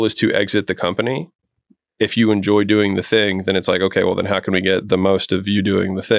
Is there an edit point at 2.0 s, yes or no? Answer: no